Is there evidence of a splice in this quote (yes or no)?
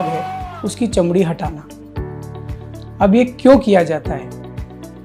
no